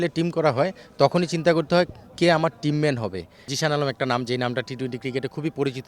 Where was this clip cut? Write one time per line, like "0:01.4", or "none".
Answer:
0:03.5